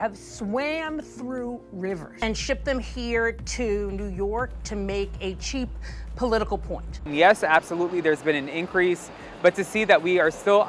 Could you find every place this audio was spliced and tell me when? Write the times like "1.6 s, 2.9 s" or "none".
2.1 s, 7.0 s